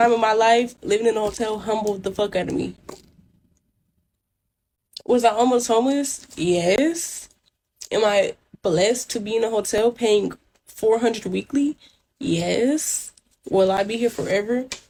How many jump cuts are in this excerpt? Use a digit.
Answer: 0